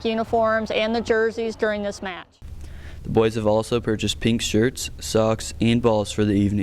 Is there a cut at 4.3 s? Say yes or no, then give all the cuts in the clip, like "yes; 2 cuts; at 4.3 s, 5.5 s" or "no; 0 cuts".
no; 1 cut; at 2.5 s